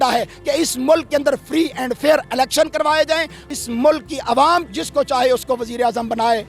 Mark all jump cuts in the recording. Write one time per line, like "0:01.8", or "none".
0:03.5
0:04.7